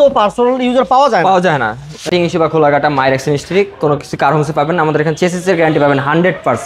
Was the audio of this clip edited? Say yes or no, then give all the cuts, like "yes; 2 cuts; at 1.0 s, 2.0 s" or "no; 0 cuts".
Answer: yes; 1 cut; at 2.1 s